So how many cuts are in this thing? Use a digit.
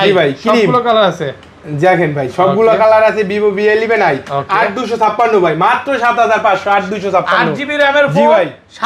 0